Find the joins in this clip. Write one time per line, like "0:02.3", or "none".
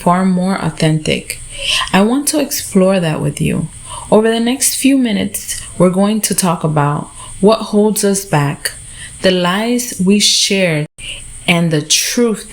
0:10.9